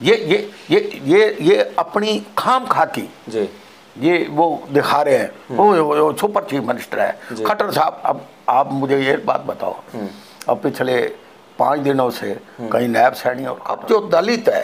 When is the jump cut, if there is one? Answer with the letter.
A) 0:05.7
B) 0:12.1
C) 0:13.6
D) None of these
C